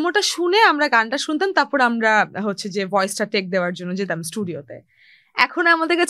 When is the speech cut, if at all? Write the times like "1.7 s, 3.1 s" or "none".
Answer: none